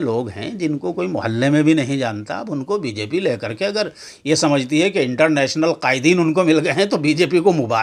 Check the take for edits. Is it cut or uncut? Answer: uncut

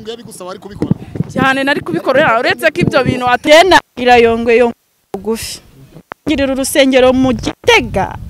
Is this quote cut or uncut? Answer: cut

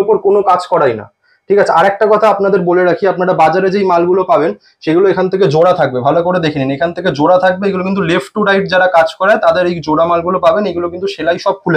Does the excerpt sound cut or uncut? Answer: uncut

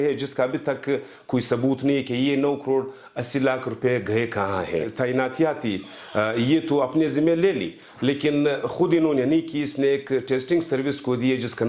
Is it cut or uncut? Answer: uncut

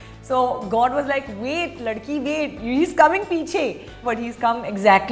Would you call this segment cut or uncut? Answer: cut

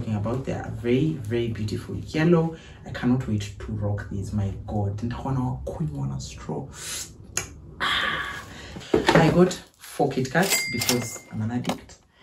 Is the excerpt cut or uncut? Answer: cut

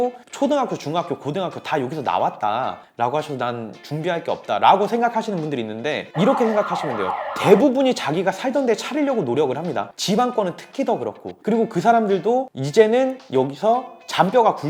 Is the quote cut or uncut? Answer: uncut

